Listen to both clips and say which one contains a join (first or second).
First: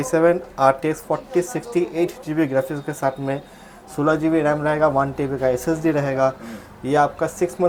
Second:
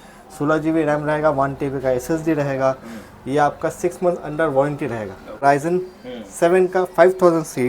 second